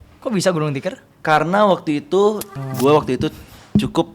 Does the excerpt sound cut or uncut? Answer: cut